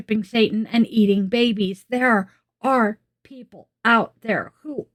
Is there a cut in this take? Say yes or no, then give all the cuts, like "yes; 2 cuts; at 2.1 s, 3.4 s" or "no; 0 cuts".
no; 0 cuts